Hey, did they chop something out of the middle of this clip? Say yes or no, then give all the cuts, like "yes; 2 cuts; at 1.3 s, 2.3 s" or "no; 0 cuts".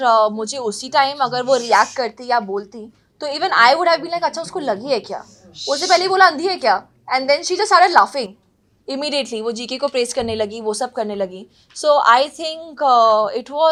no; 0 cuts